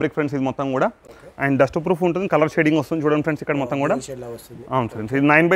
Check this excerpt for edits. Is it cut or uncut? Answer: uncut